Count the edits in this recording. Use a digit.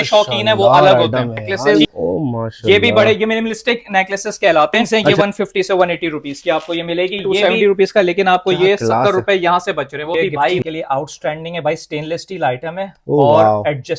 4